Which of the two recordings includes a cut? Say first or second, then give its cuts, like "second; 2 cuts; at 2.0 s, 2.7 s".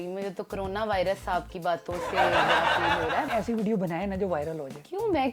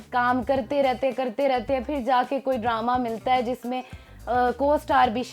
first; 2 cuts; at 2.0 s, 3.2 s